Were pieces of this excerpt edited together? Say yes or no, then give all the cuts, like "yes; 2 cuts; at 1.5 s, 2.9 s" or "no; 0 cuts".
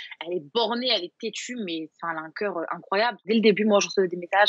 yes; 1 cut; at 3.2 s